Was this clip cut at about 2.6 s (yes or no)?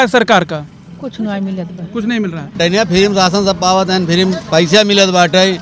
yes